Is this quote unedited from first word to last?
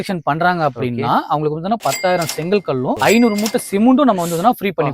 no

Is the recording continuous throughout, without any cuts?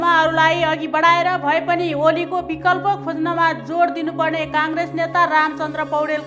yes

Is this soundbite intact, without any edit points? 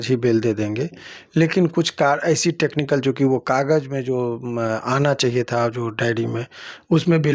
yes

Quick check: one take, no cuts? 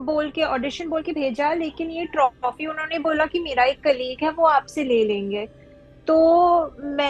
yes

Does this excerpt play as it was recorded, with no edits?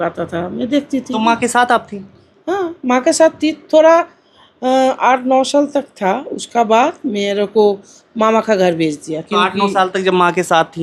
yes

